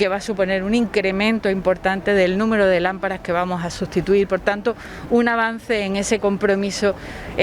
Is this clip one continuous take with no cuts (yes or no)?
yes